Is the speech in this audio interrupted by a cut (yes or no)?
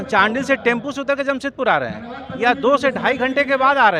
no